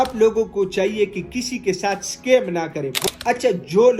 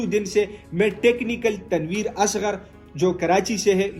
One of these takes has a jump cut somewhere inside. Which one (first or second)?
first